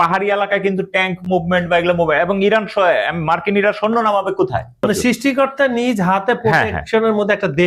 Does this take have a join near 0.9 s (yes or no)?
no